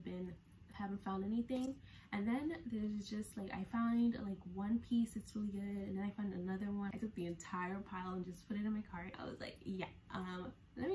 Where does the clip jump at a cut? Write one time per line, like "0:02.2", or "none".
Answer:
0:06.9
0:09.1